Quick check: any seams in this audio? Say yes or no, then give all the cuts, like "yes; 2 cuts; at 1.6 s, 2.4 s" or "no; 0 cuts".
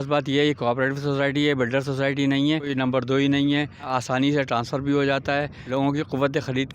yes; 3 cuts; at 2.7 s, 3.9 s, 5.6 s